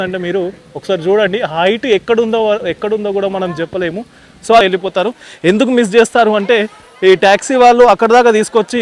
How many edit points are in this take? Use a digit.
1